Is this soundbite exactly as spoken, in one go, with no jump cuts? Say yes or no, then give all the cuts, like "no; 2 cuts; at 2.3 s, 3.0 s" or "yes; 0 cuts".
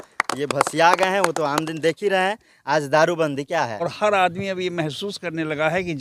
no; 1 cut; at 3.8 s